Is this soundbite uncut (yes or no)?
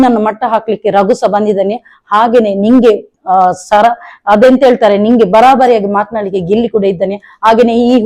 yes